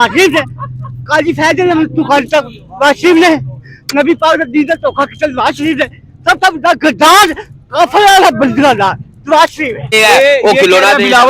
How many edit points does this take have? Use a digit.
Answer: 1